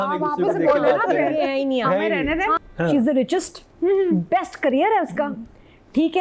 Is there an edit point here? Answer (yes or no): yes